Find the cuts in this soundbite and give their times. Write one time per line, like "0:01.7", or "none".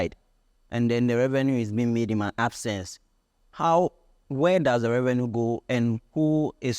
none